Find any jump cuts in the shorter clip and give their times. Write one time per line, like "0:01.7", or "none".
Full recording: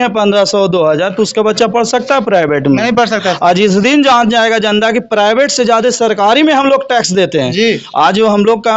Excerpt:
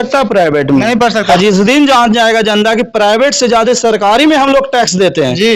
0:01.3